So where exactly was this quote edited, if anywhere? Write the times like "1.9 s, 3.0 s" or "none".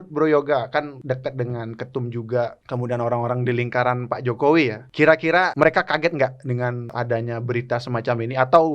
1.0 s, 2.6 s, 5.4 s, 6.9 s